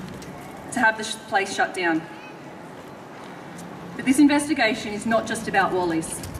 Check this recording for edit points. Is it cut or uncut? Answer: uncut